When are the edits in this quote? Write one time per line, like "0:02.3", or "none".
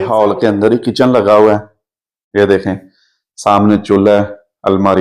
none